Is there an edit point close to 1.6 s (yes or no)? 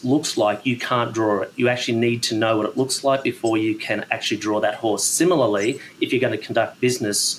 no